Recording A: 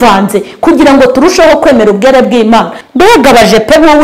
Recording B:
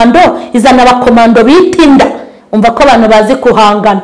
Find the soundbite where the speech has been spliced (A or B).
A